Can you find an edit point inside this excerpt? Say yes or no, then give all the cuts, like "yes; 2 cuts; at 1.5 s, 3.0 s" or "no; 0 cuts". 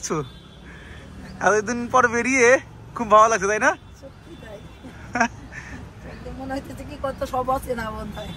no; 0 cuts